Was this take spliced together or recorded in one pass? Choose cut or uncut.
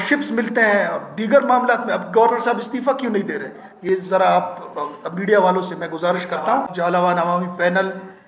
cut